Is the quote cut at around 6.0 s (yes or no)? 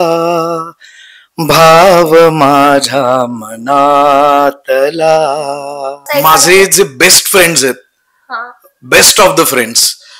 yes